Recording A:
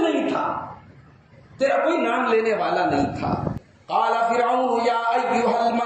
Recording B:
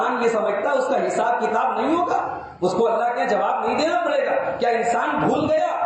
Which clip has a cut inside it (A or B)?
A